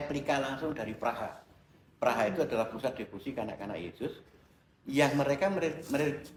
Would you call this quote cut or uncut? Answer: uncut